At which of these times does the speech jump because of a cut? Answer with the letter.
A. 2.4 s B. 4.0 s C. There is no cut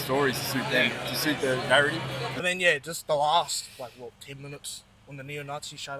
A